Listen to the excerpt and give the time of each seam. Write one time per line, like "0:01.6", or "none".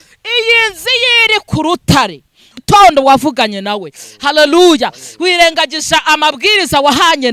0:02.6